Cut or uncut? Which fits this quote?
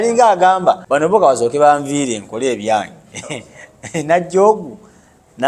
cut